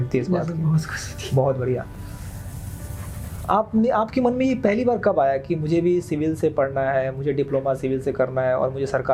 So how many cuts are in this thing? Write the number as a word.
zero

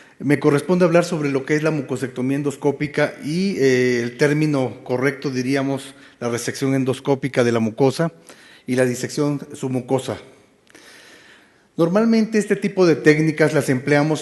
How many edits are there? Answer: zero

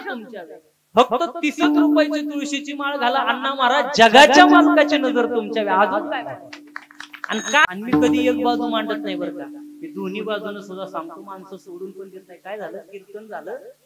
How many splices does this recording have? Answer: one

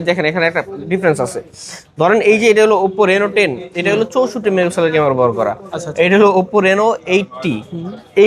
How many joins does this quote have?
zero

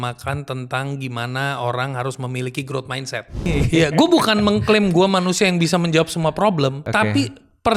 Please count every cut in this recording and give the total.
two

